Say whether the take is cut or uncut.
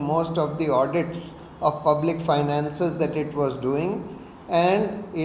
uncut